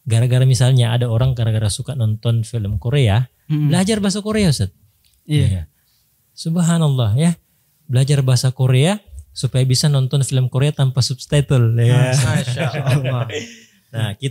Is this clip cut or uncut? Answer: uncut